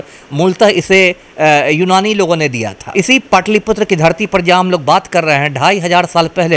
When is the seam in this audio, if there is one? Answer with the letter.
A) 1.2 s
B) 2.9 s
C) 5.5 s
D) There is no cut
B